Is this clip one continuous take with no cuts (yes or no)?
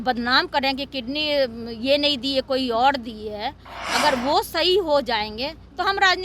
yes